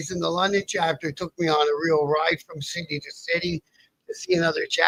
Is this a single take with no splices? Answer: yes; 0 cuts

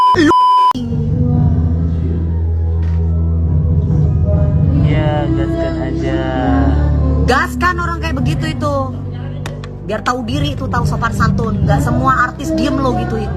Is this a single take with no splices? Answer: yes; 0 cuts

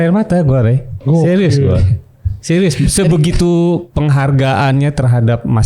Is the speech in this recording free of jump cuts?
no; 1 cut; at 3.9 s

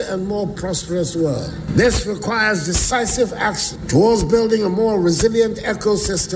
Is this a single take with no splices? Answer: no; 2 cuts; at 1.6 s, 3.7 s

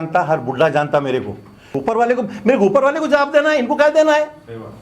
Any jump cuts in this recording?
yes; 1 cut; at 1.7 s

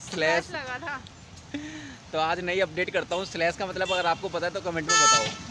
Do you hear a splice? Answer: no; 0 cuts

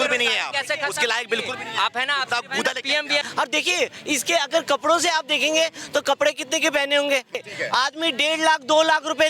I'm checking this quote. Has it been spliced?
yes; 2 cuts; at 3.3 s, 7.5 s

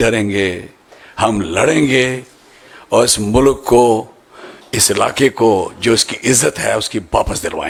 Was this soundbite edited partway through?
no; 0 cuts

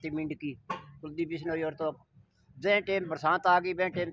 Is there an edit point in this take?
no; 0 cuts

